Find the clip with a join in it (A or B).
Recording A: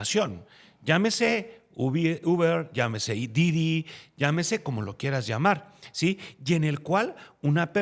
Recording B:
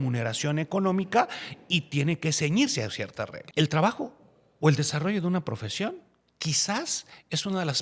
B